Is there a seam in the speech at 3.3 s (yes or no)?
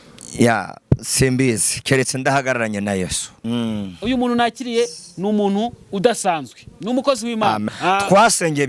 yes